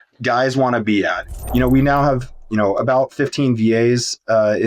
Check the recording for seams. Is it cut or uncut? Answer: cut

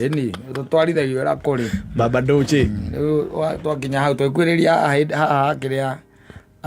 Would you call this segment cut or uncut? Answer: uncut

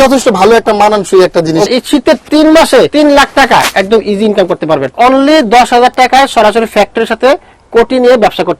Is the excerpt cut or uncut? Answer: cut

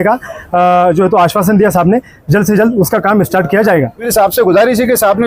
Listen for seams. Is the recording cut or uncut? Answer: cut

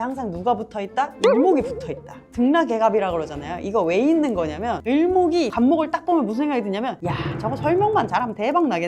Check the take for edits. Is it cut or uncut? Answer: uncut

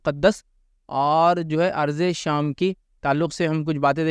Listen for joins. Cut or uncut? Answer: uncut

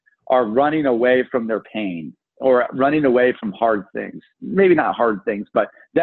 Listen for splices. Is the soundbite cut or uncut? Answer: uncut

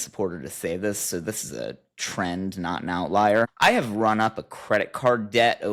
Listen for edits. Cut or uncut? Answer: uncut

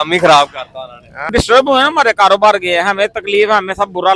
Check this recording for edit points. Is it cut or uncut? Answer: cut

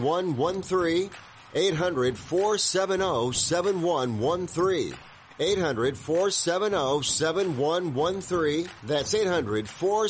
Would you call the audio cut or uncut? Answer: cut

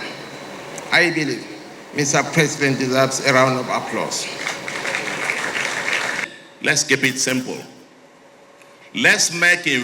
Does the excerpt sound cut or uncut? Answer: cut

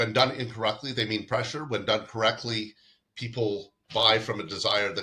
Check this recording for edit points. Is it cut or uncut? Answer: uncut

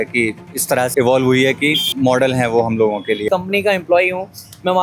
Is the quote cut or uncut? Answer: cut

